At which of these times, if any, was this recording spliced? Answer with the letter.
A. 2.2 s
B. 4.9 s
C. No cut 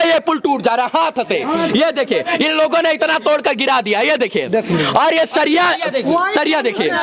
C